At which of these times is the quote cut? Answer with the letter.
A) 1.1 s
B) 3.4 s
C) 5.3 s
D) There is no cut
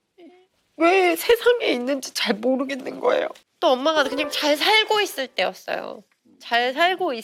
B